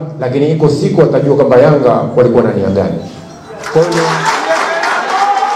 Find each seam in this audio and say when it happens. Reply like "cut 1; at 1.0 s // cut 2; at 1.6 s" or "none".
cut 1; at 4.1 s